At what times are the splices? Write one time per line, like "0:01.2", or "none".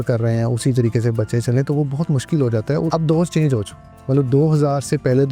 0:02.9